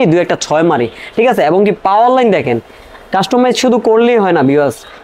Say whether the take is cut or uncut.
uncut